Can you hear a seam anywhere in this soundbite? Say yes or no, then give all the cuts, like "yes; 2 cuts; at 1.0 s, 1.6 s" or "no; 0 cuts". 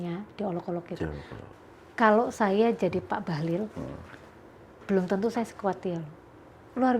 yes; 1 cut; at 1.4 s